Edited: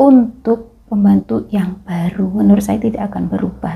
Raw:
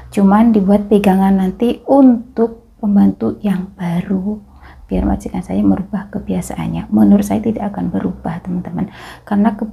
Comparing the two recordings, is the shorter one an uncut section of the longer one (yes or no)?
no